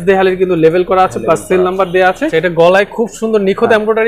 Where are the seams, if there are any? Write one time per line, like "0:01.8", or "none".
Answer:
0:02.3